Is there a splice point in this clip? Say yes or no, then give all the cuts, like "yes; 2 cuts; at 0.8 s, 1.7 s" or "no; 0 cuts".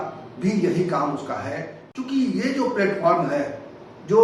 yes; 1 cut; at 1.8 s